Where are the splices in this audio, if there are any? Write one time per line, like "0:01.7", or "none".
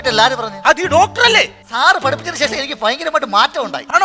0:01.7